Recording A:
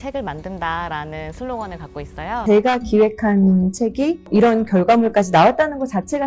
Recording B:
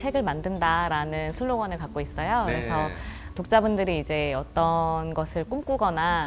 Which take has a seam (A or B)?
A